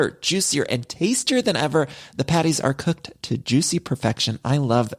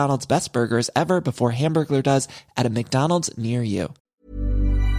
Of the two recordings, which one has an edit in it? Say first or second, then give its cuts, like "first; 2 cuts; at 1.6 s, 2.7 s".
second; 1 cut; at 4.0 s